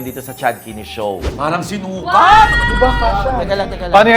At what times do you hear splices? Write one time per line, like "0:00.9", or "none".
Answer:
0:01.3